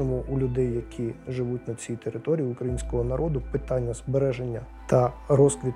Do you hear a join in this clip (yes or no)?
yes